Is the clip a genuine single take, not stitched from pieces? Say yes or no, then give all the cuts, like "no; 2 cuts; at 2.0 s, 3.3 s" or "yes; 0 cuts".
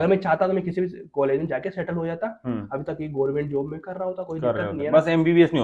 yes; 0 cuts